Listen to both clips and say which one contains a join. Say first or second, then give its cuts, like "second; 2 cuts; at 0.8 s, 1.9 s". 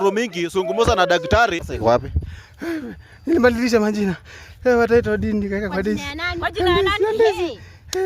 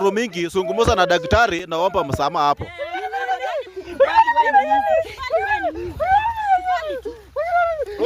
first; 1 cut; at 1.6 s